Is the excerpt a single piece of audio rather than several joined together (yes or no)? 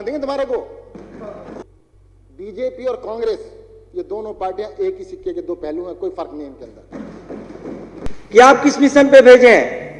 no